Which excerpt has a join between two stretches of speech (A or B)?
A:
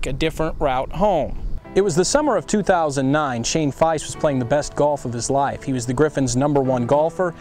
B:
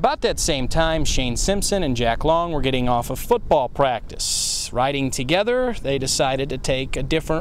A